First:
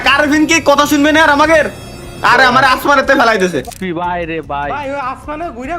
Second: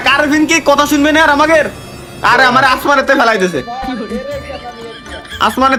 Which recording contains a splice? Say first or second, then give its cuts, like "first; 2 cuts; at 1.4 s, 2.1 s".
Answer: first; 1 cut; at 3.7 s